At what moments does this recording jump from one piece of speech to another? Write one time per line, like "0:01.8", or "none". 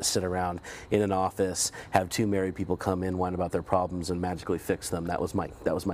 none